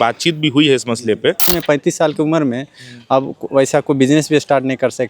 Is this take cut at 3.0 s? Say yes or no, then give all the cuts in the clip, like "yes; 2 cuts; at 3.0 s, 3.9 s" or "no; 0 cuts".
no; 1 cut; at 1.6 s